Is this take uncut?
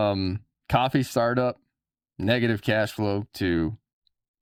yes; 0 cuts

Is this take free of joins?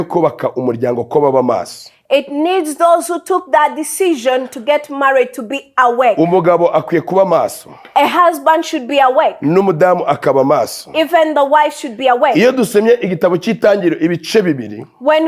yes; 0 cuts

